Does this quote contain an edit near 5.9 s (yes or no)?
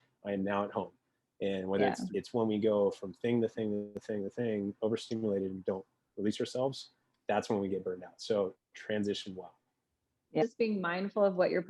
no